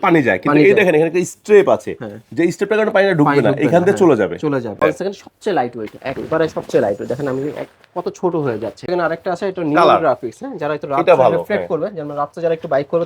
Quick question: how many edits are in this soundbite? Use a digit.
2